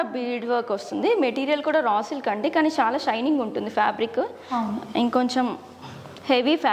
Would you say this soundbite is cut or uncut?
uncut